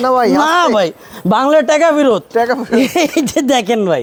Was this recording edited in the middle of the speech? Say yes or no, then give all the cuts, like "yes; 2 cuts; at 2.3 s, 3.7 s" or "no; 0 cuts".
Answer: no; 0 cuts